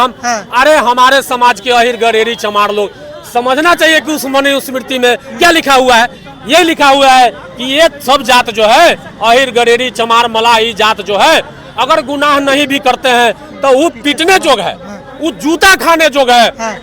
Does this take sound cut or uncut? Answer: uncut